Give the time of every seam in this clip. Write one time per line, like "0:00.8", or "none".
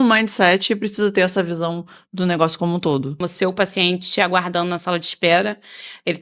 0:03.2